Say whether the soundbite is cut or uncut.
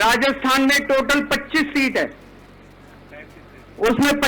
uncut